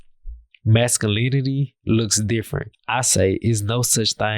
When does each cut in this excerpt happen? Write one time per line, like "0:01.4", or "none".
0:02.8